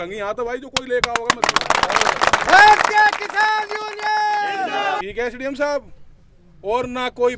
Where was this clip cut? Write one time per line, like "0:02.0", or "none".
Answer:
0:05.0